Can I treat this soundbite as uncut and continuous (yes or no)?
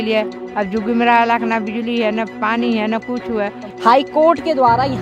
no